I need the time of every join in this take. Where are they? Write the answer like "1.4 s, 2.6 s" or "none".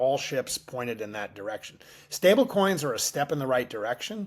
none